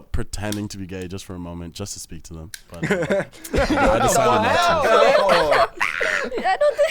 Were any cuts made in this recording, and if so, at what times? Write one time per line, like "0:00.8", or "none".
0:02.6